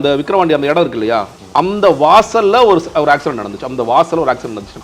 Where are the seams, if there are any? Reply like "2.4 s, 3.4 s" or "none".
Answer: none